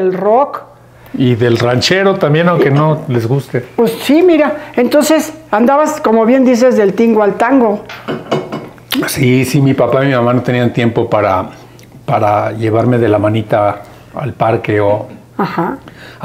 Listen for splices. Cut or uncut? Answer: uncut